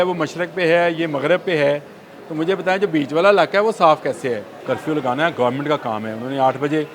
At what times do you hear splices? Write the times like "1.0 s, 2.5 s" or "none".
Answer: 4.5 s